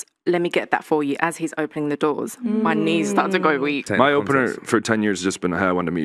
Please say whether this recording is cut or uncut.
cut